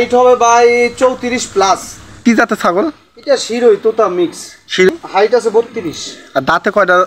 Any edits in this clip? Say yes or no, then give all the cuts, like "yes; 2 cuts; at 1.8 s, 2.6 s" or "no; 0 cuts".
yes; 2 cuts; at 2.2 s, 4.9 s